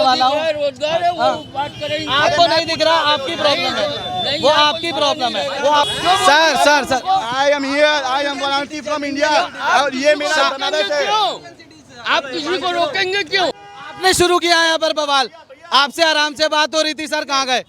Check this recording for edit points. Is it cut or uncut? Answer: cut